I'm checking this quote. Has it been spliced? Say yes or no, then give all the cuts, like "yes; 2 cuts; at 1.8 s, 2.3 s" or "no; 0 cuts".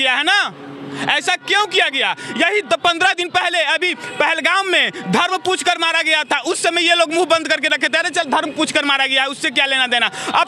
no; 0 cuts